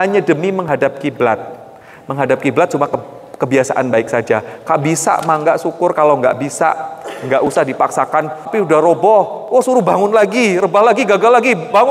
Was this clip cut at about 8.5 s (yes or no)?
yes